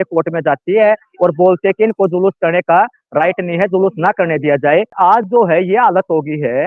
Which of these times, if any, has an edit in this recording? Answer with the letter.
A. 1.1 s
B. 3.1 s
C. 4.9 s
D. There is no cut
C